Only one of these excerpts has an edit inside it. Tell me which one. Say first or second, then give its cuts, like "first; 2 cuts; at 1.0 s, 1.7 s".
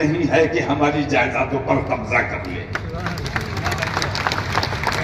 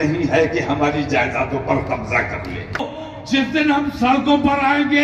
second; 1 cut; at 2.9 s